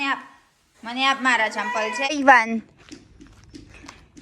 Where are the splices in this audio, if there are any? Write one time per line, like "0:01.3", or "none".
0:02.1